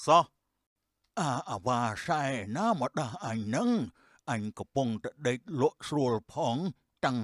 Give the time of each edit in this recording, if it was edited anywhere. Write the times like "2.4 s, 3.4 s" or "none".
none